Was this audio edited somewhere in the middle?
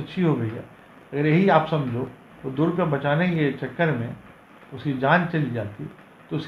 no; 0 cuts

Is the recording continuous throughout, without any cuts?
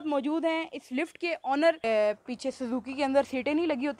no; 1 cut; at 1.8 s

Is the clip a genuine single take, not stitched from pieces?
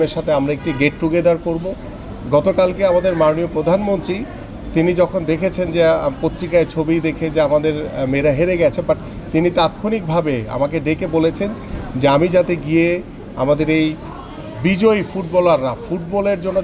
no; 1 cut; at 1.9 s

